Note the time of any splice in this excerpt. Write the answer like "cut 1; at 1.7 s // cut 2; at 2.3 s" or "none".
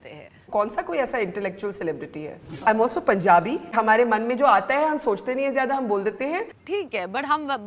cut 1; at 2.6 s // cut 2; at 3.7 s // cut 3; at 6.5 s